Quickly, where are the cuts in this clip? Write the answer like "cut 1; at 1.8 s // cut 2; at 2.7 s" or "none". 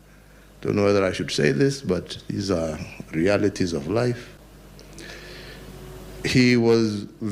cut 1; at 4.4 s